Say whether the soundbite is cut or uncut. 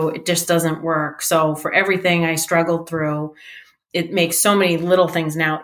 uncut